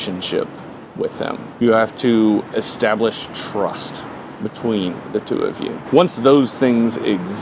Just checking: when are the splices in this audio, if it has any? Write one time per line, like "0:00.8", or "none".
0:01.5
0:05.8